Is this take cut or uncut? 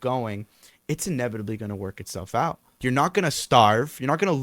cut